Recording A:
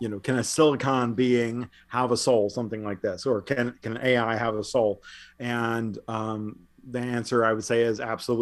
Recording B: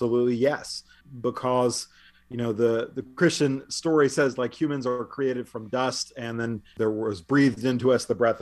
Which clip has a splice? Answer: B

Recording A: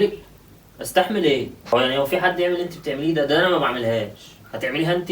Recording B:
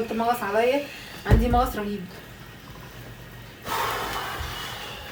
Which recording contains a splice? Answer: A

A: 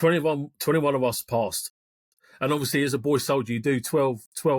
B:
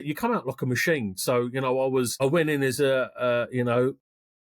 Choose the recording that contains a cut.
B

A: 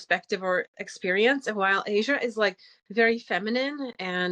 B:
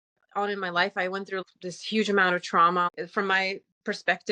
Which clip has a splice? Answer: B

